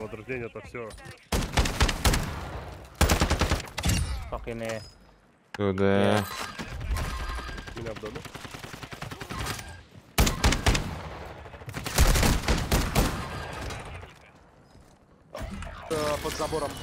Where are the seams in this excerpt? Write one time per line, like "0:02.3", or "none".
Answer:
0:15.8